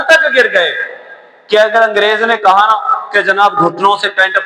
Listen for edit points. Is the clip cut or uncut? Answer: uncut